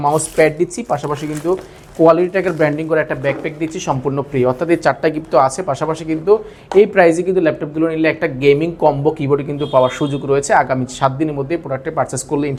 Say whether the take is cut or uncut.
uncut